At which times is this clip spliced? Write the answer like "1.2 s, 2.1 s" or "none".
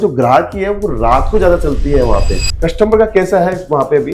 2.4 s